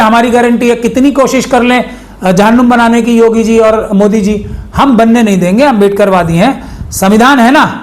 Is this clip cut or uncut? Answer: uncut